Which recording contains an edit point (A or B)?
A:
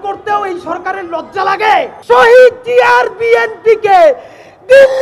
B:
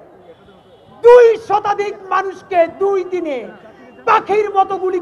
A